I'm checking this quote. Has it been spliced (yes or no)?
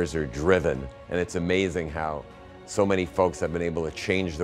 yes